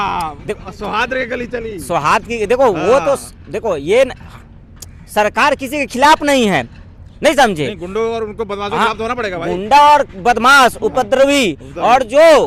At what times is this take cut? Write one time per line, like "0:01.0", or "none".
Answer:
none